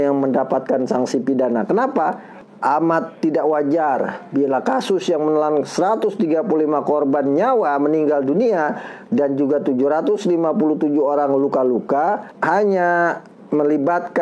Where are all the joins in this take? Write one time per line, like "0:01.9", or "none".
0:02.3